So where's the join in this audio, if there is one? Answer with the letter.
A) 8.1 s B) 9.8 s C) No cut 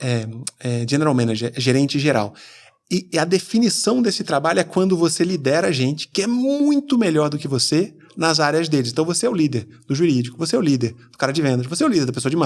C